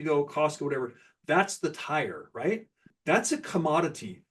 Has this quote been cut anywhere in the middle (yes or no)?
yes